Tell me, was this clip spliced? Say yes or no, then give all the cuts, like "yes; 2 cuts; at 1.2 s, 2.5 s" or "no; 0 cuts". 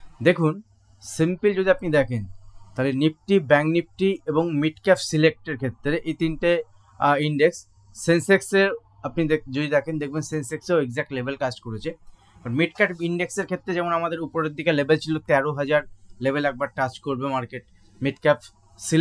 no; 0 cuts